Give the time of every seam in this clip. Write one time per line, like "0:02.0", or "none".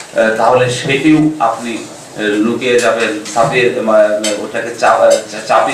none